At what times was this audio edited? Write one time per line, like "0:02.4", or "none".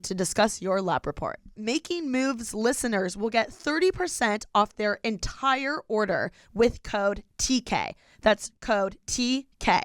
0:01.6

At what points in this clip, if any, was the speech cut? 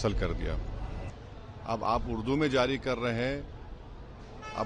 0:01.1

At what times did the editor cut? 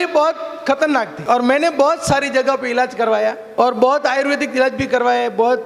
0:01.1
0:03.4

